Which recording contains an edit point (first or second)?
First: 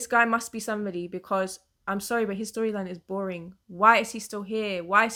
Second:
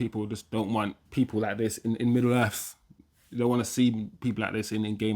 second